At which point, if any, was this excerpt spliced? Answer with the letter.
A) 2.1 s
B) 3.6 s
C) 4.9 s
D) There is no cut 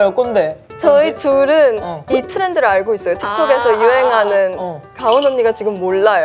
C